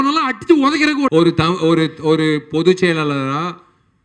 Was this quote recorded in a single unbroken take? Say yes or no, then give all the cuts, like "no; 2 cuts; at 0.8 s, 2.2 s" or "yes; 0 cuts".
no; 1 cut; at 1.1 s